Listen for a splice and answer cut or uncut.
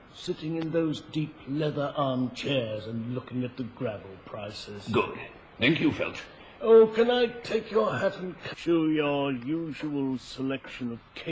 uncut